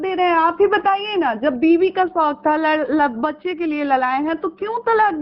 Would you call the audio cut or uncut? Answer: uncut